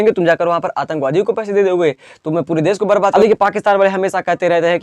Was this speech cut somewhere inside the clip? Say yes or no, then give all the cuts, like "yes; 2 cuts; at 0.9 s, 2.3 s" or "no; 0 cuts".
yes; 1 cut; at 3.1 s